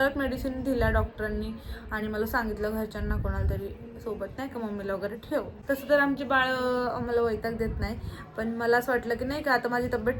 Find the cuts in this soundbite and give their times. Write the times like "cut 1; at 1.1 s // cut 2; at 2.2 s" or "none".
none